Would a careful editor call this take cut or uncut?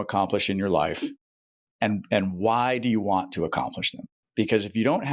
uncut